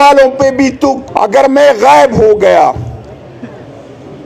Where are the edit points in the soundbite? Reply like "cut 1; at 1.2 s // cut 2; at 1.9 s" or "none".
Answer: cut 1; at 1.0 s